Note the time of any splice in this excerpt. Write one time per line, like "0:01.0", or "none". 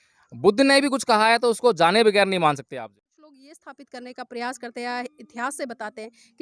0:02.8